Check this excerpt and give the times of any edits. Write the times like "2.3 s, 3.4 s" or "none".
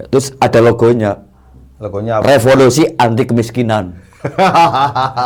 none